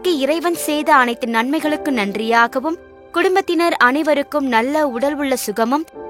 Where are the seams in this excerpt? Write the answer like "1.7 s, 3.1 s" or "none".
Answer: none

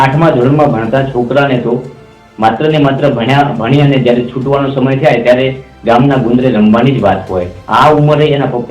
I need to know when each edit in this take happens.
7.6 s

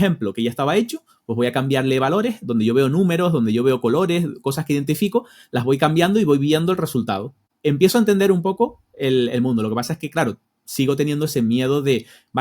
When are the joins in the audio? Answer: 7.5 s

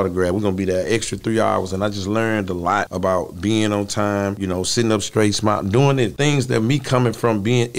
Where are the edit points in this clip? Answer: 2.9 s, 4.4 s, 6.1 s

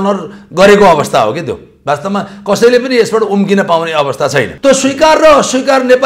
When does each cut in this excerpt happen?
4.5 s

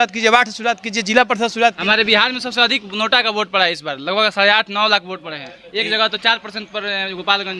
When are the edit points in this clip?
1.8 s

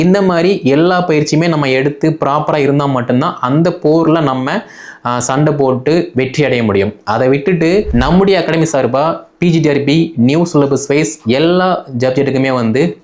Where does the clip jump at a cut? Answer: 7.9 s

